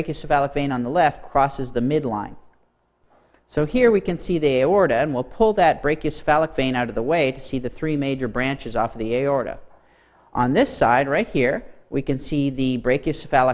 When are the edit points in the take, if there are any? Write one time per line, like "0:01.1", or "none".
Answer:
0:08.0